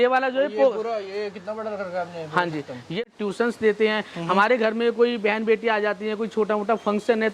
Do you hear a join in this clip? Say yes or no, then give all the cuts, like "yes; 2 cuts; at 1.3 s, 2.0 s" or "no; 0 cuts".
yes; 1 cut; at 3.0 s